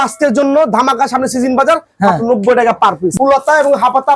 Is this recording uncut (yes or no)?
no